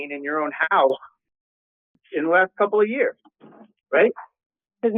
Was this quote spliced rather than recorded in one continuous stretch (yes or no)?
no